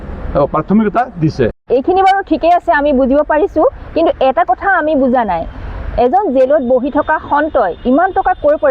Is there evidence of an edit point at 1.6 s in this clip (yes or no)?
yes